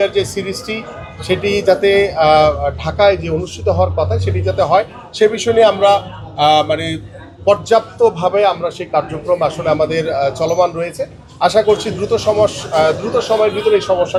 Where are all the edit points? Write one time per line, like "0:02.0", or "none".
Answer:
none